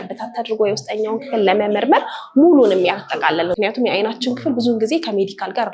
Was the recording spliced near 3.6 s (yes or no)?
yes